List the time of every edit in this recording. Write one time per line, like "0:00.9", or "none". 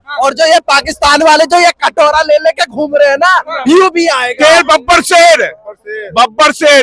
0:04.3